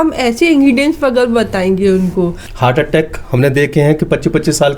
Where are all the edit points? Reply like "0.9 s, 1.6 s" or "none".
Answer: 2.4 s